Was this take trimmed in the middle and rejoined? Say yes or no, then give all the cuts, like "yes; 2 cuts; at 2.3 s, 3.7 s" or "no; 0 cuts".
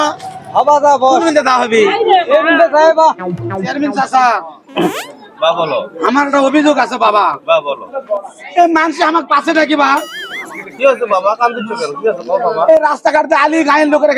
yes; 1 cut; at 3.7 s